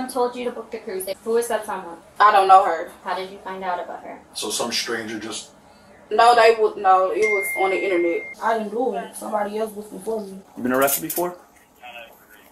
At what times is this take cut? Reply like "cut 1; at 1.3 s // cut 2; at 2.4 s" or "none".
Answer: cut 1; at 1.1 s // cut 2; at 8.3 s // cut 3; at 10.4 s